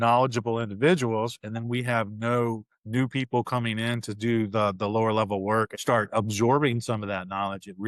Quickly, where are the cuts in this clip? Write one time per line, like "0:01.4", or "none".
0:05.7